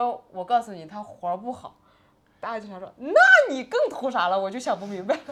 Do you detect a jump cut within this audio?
no; 0 cuts

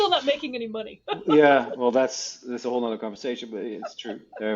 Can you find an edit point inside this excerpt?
yes; 1 cut; at 1.0 s

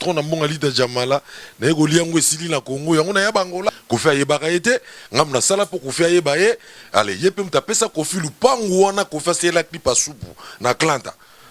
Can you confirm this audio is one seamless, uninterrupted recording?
no; 1 cut; at 3.7 s

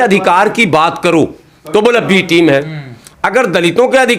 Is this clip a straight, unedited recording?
yes; 0 cuts

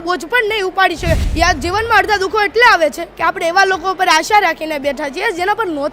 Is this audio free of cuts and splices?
no; 1 cut; at 1.3 s

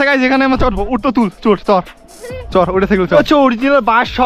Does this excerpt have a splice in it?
yes; 1 cut; at 3.0 s

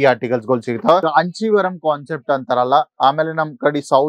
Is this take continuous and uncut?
no; 1 cut; at 1.0 s

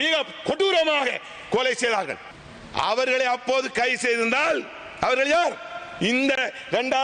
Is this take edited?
no; 0 cuts

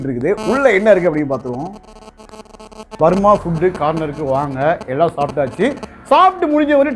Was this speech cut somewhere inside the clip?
yes; 1 cut; at 2.9 s

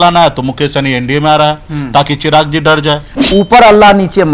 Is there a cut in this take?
yes; 1 cut; at 3.1 s

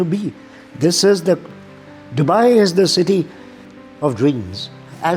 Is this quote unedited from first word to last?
no; 1 cut; at 3.6 s

